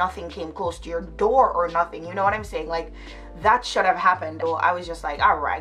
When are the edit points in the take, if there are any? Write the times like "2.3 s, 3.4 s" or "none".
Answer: 4.4 s